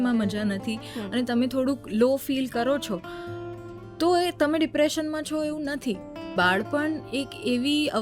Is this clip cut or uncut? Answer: cut